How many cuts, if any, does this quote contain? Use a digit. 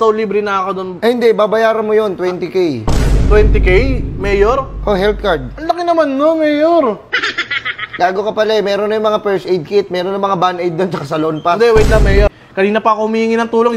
1